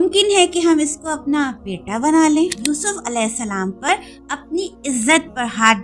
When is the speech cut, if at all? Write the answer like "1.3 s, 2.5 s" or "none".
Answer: 2.6 s